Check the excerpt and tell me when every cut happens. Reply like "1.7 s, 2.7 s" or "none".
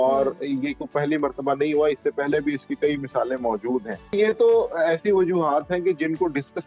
4.1 s